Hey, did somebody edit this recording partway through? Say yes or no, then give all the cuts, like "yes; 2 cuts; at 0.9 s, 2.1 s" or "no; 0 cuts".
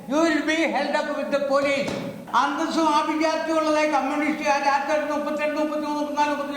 yes; 1 cut; at 2.2 s